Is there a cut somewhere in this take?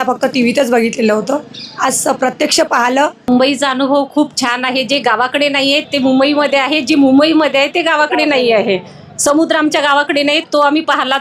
yes; 1 cut; at 3.3 s

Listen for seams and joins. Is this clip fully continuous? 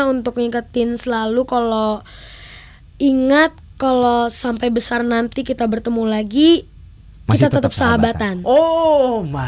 yes; 0 cuts

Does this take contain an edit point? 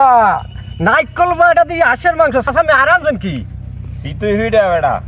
yes; 1 cut; at 2.5 s

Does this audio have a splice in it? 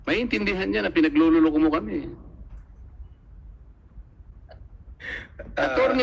no; 0 cuts

